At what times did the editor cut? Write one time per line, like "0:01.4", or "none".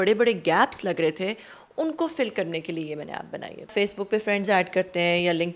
0:03.7

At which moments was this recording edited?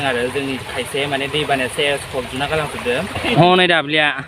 0:03.2

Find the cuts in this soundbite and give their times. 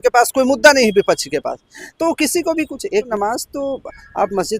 0:03.1

